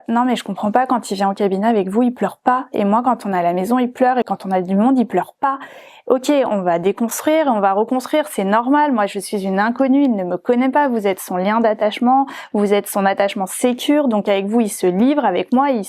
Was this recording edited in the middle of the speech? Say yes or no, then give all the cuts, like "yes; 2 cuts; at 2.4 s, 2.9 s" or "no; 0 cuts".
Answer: no; 0 cuts